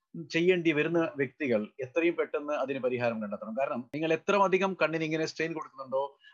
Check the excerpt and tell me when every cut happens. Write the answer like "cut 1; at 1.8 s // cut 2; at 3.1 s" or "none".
cut 1; at 3.9 s